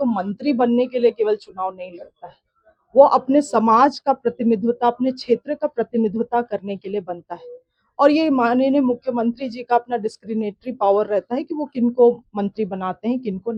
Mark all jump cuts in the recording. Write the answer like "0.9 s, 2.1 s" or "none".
none